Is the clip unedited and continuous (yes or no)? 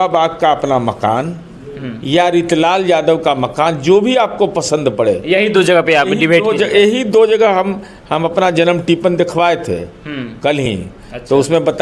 yes